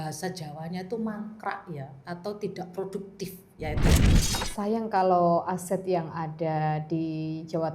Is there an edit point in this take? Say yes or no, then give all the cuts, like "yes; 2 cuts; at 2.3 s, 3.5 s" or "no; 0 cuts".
yes; 1 cut; at 4.0 s